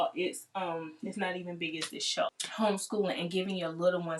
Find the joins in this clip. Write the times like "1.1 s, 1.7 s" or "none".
2.4 s